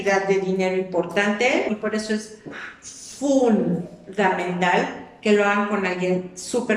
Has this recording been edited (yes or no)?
yes